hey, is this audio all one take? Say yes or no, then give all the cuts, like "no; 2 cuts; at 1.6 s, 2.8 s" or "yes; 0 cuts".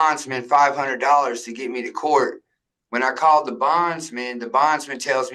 yes; 0 cuts